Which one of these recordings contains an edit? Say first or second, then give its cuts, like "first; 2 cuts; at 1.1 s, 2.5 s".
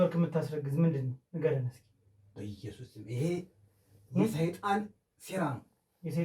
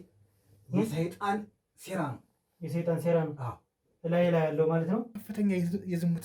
second; 1 cut; at 5.2 s